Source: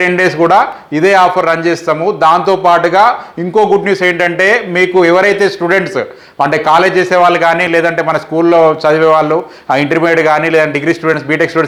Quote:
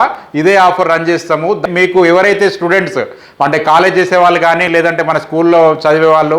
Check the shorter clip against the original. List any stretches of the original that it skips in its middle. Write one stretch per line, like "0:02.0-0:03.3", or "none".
0:02.2-0:04.6